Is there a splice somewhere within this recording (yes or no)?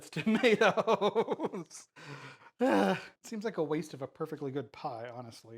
no